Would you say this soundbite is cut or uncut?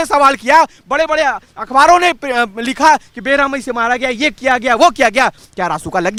uncut